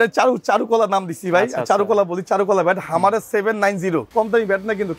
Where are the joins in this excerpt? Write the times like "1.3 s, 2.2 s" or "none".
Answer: 4.1 s